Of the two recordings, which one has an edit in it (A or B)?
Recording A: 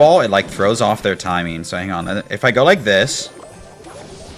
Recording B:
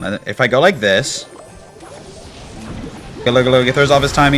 B